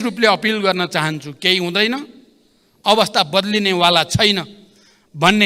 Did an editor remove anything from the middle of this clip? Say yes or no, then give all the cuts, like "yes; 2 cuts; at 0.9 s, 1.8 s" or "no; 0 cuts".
no; 0 cuts